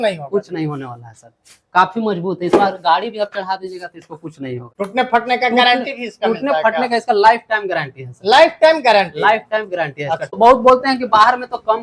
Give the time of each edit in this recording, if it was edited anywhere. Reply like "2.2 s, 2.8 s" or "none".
10.2 s